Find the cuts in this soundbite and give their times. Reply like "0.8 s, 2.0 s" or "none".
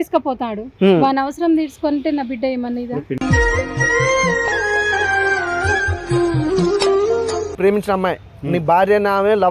7.6 s